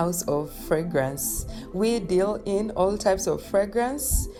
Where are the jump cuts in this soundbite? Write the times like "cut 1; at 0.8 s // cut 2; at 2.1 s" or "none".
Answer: none